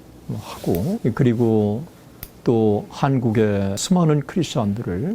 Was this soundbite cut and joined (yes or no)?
yes